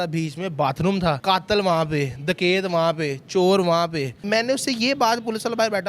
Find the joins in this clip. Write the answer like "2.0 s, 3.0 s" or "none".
1.2 s, 4.2 s